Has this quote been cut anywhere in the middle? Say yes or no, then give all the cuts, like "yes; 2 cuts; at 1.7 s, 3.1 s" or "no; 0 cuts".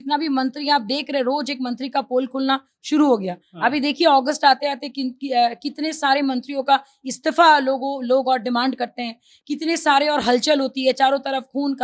no; 0 cuts